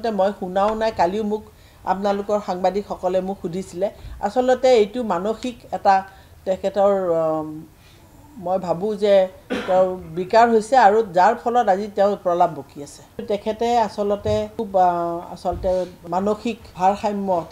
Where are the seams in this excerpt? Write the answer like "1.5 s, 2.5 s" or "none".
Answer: 13.2 s, 14.6 s, 16.4 s